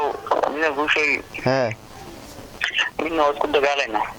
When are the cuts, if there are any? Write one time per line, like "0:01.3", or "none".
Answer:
none